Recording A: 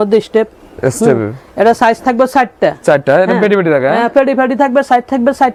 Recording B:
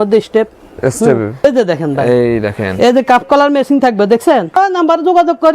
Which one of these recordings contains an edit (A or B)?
B